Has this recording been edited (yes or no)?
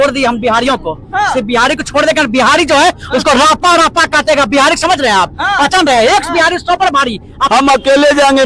yes